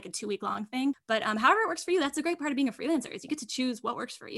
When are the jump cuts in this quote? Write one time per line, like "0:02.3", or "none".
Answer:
0:01.0